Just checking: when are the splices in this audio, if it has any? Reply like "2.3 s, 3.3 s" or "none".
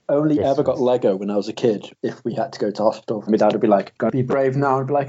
1.9 s, 3.3 s, 3.9 s

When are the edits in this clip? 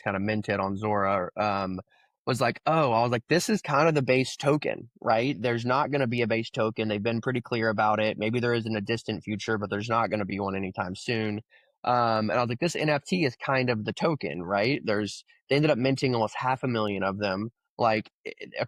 none

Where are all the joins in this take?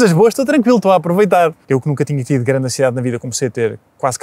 1.6 s

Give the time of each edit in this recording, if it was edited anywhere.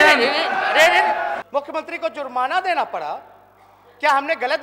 1.4 s

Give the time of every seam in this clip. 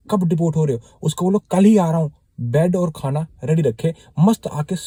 none

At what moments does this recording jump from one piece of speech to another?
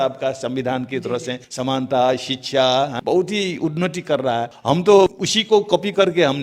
1.4 s, 3.0 s, 4.5 s, 5.3 s

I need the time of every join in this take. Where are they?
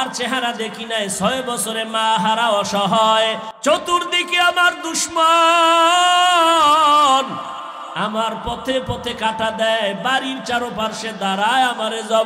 3.5 s

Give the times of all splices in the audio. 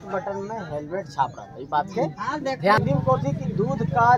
2.8 s

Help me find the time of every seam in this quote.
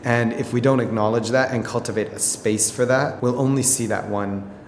3.1 s

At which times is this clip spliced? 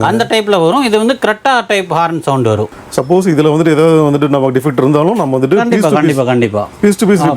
2.7 s

